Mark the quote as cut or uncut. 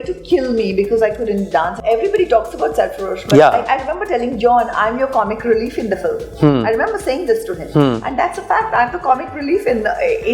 cut